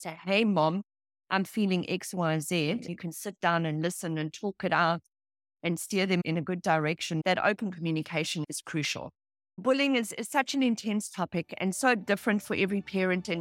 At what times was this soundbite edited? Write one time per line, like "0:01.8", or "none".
0:02.9
0:06.2
0:09.6